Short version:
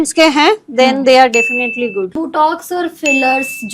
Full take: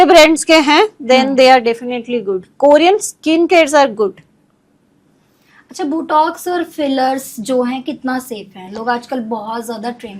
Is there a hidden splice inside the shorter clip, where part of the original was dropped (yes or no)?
yes